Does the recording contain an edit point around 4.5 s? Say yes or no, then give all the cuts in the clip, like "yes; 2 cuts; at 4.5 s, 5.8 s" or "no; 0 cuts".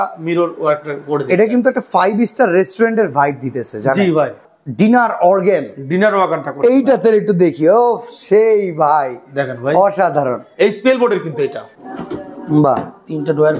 yes; 2 cuts; at 4.5 s, 11.8 s